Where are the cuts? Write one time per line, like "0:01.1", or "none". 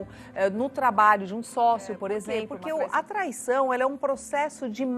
0:02.5